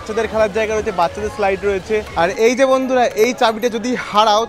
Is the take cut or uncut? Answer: cut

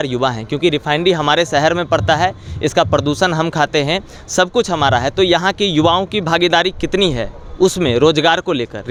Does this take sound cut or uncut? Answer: uncut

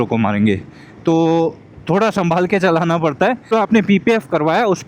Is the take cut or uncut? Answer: cut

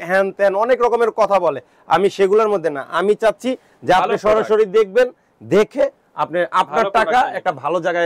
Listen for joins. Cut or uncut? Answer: uncut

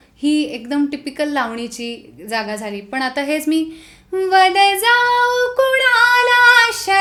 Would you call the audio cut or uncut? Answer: uncut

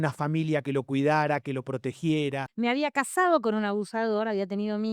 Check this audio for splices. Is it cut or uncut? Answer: cut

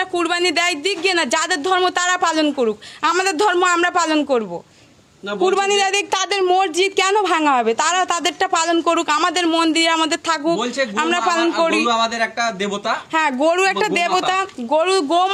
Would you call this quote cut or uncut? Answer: uncut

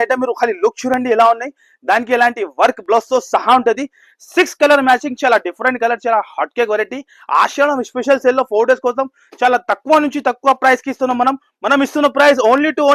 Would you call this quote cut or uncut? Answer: uncut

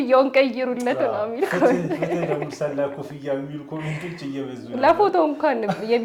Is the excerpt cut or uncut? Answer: uncut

